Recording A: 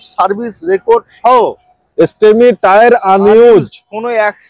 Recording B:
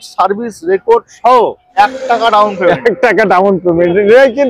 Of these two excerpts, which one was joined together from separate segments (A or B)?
B